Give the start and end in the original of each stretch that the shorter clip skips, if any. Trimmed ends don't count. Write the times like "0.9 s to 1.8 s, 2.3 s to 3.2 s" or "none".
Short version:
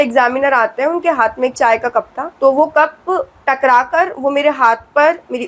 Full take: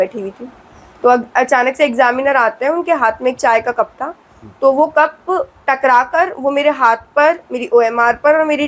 4.0 s to 4.4 s